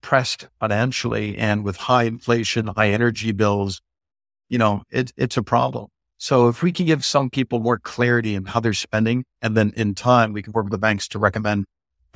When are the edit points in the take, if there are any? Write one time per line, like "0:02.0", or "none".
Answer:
none